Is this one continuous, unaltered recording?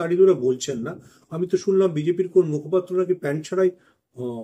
yes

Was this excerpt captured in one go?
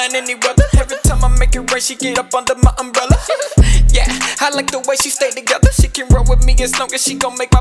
yes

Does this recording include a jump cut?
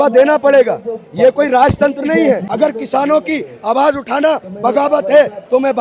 yes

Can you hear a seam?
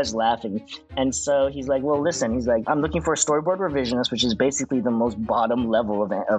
yes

